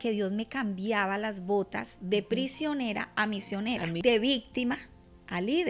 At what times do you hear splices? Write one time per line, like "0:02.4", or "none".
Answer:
0:04.0

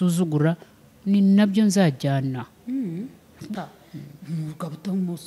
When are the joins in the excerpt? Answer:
0:03.6

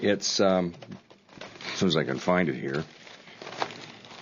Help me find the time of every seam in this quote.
none

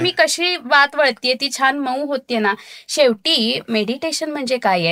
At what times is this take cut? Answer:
none

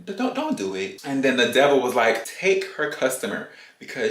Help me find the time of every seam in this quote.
0:01.0
0:02.3

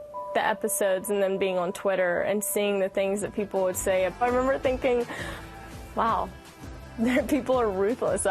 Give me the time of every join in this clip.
0:04.2

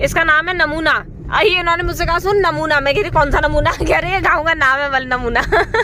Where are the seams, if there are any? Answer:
none

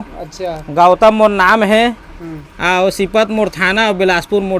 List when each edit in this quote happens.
none

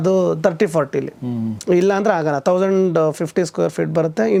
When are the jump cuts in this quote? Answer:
none

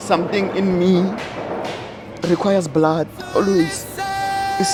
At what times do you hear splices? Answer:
none

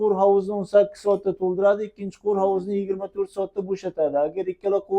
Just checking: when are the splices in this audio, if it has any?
none

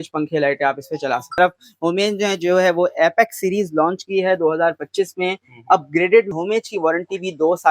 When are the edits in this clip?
0:01.4
0:06.3

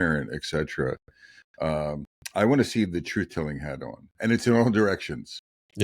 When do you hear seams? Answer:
none

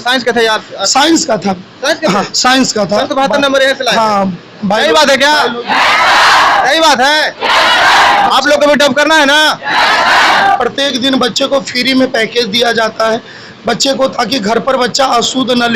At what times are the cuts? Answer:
0:10.6

